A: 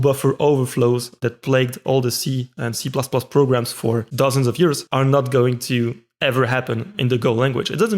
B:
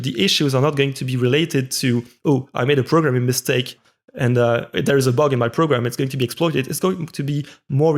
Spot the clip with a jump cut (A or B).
A